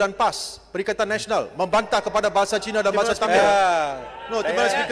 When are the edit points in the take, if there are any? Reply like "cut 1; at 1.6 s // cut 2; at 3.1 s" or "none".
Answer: cut 1; at 2.9 s

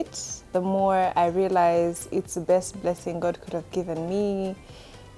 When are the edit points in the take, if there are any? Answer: none

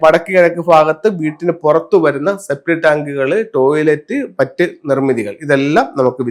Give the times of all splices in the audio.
none

